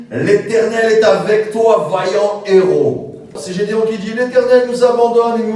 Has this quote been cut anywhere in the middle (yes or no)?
yes